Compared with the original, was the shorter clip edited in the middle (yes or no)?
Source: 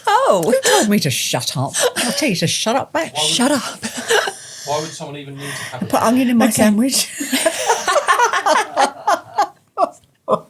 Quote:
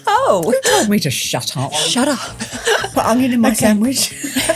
yes